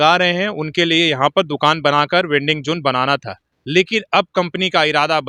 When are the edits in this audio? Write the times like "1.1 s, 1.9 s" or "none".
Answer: none